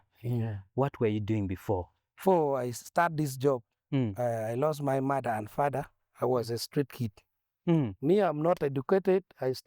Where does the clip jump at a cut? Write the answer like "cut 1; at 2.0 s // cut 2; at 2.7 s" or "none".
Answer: cut 1; at 2.2 s